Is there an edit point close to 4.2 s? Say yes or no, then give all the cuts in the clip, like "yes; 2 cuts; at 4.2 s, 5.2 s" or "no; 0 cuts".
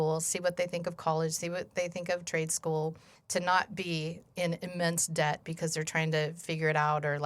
yes; 1 cut; at 4.2 s